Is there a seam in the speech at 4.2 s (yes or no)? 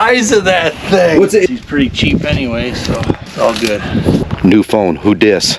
yes